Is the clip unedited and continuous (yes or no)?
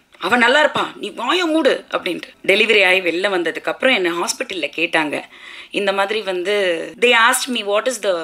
no